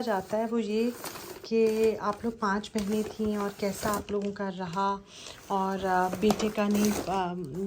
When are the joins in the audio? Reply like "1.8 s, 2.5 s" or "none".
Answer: none